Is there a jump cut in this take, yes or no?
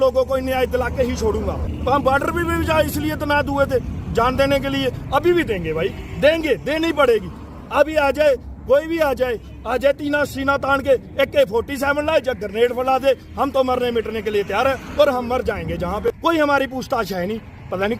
yes